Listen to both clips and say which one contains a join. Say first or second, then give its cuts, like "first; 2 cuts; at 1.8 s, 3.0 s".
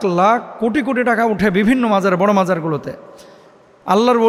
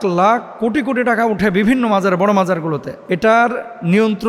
second; 1 cut; at 2.9 s